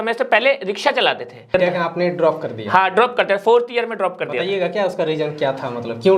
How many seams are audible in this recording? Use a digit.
1